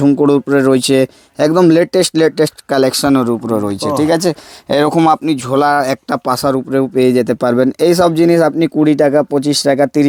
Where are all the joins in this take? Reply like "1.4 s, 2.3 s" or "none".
none